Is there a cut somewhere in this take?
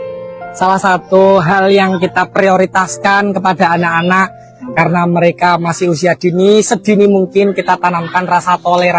no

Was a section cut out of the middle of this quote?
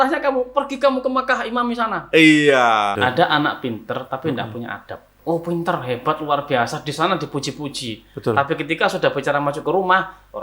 yes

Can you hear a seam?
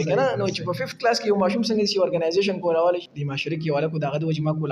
yes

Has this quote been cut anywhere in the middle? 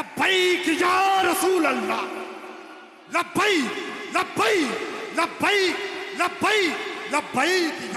no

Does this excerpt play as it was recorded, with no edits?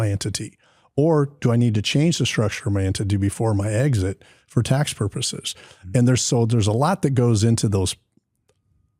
yes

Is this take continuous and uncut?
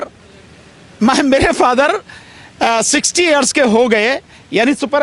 yes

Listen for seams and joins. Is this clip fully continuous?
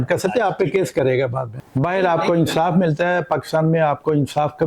no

